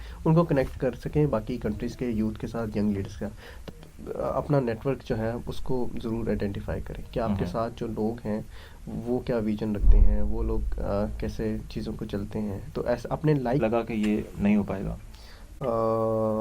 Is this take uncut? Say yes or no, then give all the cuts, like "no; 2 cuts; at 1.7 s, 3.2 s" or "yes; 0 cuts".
no; 2 cuts; at 3.5 s, 13.6 s